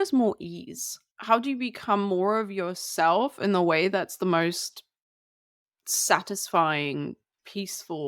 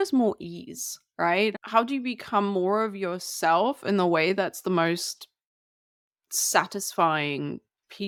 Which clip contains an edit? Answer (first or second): first